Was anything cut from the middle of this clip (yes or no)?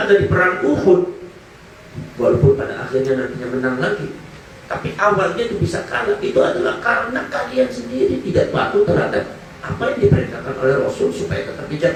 no